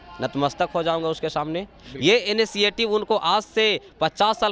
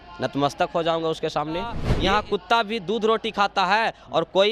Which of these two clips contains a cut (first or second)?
second